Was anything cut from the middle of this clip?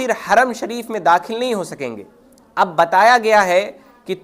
no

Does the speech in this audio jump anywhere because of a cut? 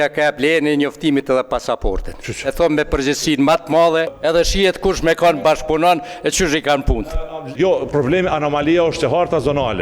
yes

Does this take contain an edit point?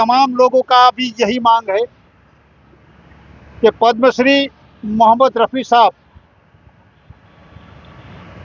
yes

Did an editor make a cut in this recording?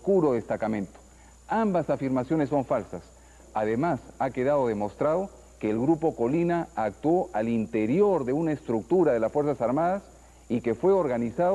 yes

